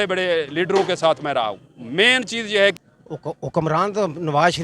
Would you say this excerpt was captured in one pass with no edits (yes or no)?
no